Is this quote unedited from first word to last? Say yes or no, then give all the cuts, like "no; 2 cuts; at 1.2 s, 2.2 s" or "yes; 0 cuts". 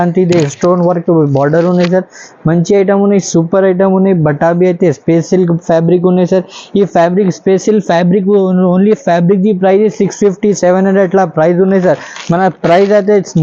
yes; 0 cuts